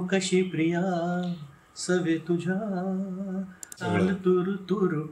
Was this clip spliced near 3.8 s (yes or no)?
yes